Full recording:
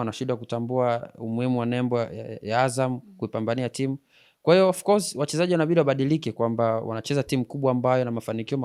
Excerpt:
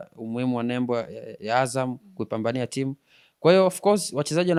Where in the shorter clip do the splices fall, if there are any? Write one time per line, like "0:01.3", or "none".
none